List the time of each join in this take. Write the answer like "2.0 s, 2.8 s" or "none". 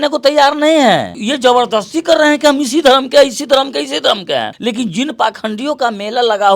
1.1 s